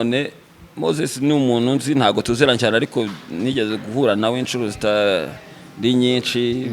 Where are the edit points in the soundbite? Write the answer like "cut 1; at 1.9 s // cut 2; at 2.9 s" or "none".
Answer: none